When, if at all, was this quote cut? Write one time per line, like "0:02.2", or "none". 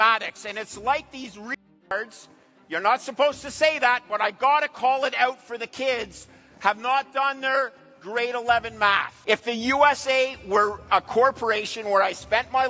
0:09.1

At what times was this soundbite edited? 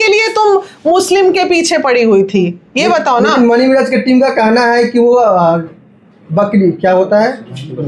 none

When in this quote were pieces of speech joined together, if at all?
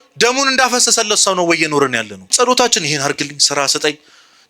0:02.3

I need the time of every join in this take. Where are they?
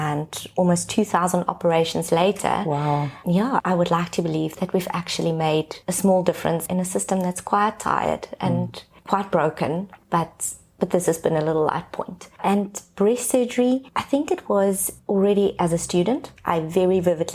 0:04.5
0:06.6
0:13.9
0:14.9

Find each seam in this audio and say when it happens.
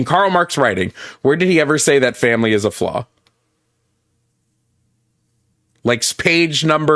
none

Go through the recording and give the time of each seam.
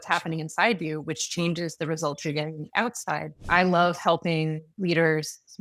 0:03.4

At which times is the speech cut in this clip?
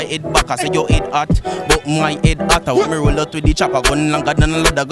none

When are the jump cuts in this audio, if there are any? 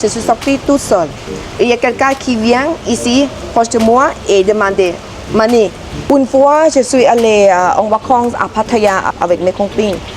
0:05.9
0:09.1

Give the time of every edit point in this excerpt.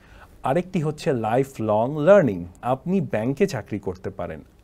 0:02.6

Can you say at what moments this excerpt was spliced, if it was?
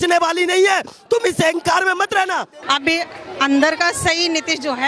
0:02.5

